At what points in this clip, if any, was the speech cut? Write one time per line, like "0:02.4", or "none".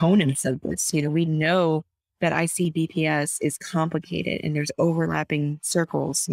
none